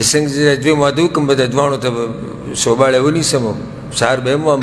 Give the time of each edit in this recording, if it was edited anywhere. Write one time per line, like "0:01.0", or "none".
none